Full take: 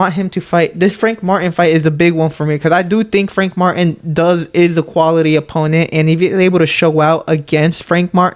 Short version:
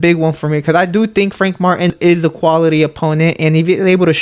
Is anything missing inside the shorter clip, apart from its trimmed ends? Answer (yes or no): yes